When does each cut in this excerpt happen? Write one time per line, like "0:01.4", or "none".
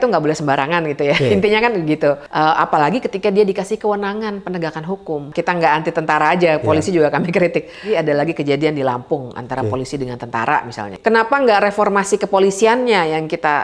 0:02.3
0:05.3
0:07.9
0:10.9